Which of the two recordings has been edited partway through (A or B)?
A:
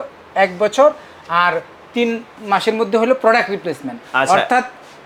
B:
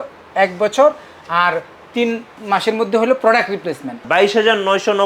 B